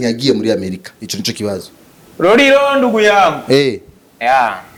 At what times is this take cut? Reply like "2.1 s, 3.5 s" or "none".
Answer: none